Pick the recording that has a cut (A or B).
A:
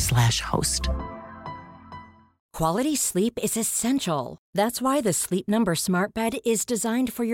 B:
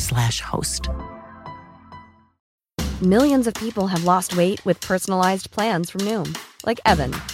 A